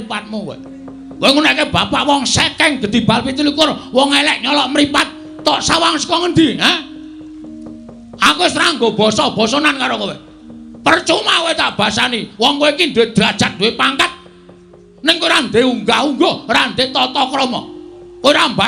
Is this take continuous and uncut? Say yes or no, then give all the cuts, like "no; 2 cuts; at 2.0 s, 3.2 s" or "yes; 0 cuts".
yes; 0 cuts